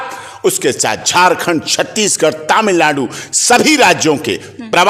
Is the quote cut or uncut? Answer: uncut